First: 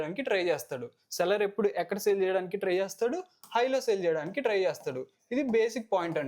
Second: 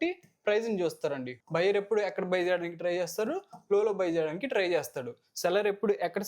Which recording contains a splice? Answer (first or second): second